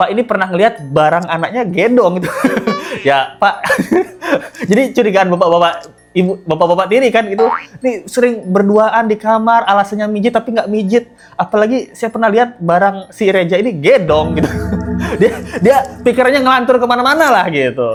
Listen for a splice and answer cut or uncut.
uncut